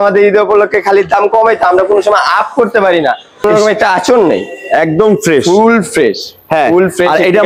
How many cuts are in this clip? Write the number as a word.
one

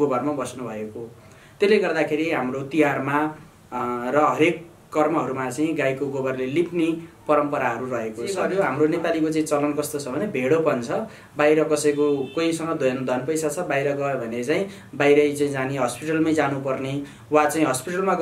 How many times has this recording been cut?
one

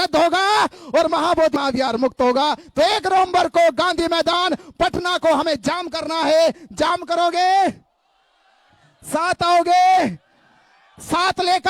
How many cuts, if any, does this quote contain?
one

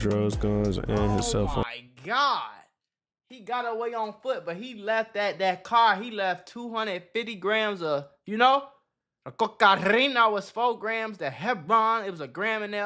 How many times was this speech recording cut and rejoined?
zero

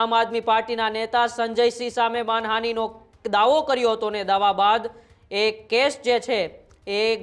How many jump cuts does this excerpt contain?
zero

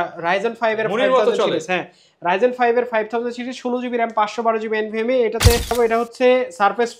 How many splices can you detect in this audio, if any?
one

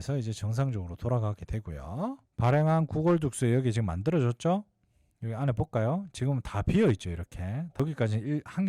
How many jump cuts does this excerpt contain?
two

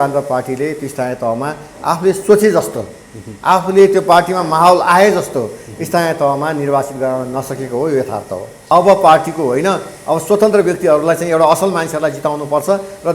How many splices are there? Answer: one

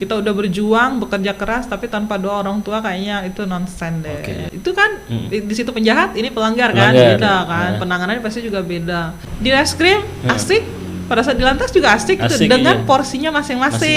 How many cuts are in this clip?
two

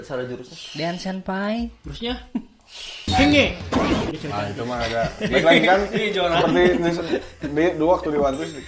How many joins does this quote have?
zero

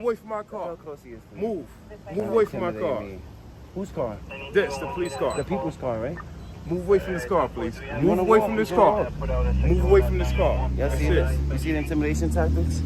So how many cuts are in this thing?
zero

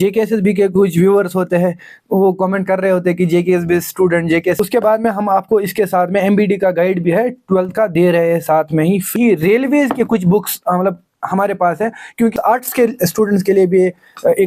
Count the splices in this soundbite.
three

